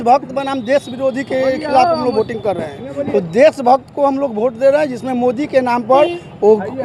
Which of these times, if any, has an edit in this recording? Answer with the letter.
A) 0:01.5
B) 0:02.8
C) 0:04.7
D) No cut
D